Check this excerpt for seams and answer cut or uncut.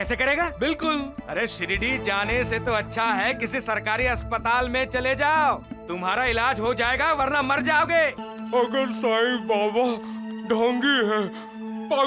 cut